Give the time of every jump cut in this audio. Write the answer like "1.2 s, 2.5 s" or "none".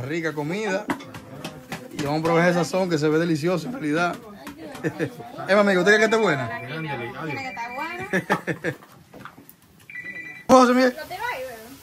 10.4 s